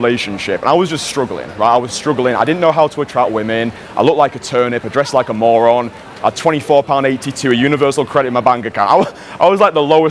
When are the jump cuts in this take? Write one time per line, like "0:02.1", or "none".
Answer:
none